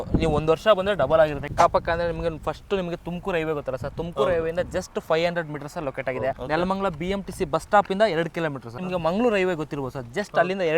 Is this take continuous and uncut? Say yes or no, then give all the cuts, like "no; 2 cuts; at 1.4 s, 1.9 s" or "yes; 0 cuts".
no; 3 cuts; at 1.5 s, 6.3 s, 8.8 s